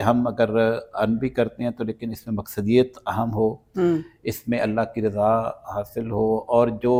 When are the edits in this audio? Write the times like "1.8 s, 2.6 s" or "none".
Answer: none